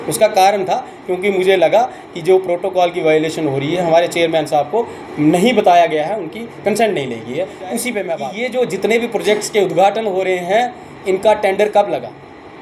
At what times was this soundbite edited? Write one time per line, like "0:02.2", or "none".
0:08.2

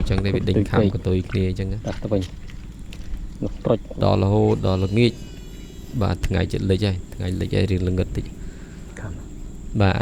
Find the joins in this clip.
0:04.0

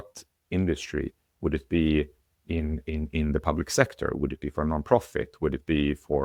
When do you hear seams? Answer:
none

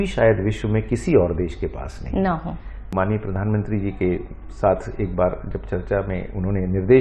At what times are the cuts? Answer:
0:02.9

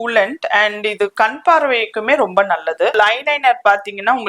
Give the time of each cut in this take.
0:02.9

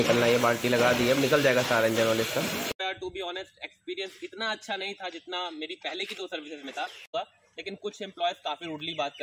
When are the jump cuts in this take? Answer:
0:02.7
0:07.1

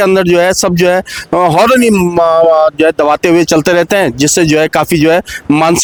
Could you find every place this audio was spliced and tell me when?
none

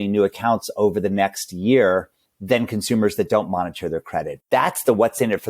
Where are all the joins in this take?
0:04.4

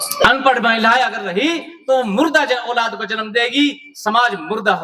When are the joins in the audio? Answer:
none

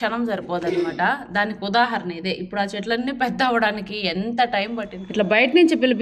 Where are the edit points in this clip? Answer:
0:05.0

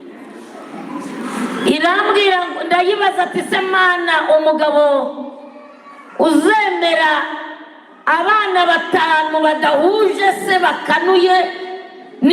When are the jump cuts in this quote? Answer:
none

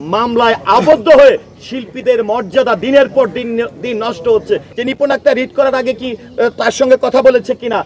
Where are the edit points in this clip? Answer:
0:04.7

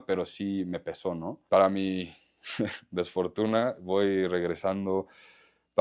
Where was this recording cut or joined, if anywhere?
0:01.4

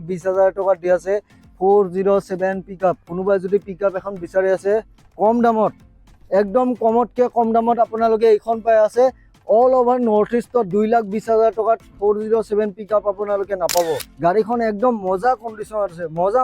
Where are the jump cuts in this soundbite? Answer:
0:14.1

